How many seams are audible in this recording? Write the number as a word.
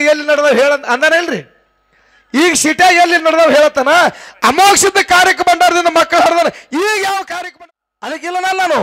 one